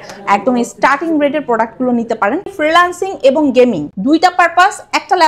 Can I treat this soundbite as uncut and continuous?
no; 2 cuts; at 2.5 s, 3.9 s

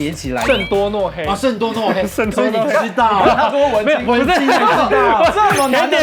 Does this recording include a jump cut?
no; 0 cuts

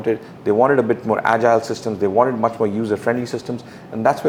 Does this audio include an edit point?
no; 0 cuts

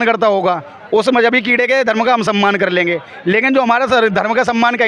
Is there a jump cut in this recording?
no; 0 cuts

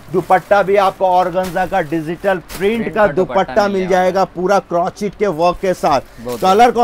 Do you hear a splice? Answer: no; 0 cuts

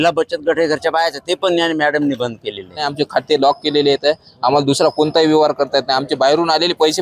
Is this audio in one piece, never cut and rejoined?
no; 1 cut; at 2.9 s

